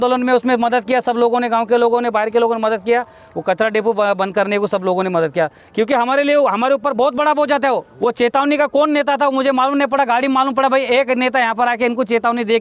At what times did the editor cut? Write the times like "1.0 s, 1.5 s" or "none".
7.9 s